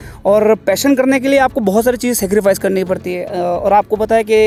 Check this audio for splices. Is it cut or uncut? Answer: uncut